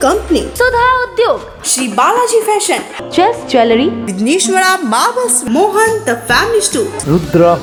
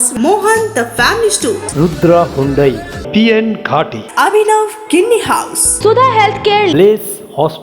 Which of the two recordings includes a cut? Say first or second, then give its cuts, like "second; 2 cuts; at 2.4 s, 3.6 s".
second; 1 cut; at 5.6 s